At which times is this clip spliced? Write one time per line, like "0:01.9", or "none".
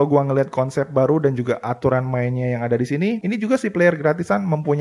0:03.2